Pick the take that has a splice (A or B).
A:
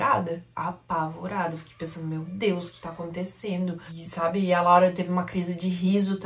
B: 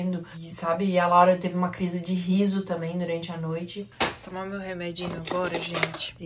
B